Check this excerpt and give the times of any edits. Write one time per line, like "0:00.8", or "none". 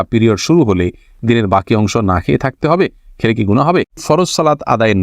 0:04.0